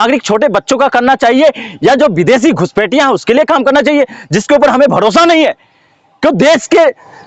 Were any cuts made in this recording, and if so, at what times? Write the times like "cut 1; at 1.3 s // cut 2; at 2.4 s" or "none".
none